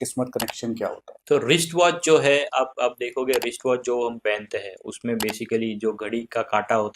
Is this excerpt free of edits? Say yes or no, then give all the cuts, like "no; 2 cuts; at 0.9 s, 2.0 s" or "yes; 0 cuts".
no; 1 cut; at 1.2 s